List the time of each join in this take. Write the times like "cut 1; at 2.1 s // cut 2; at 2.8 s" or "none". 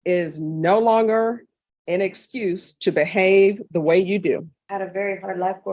cut 1; at 4.6 s